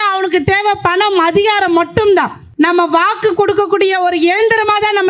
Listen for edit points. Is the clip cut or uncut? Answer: cut